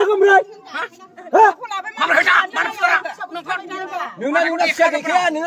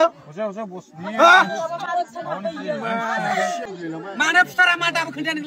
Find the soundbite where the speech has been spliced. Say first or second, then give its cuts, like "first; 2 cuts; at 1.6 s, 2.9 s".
second; 1 cut; at 3.6 s